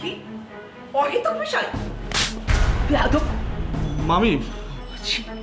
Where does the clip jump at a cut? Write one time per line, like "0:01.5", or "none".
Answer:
0:03.3